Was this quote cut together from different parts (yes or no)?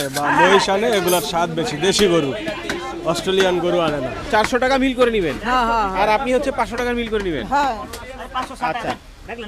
yes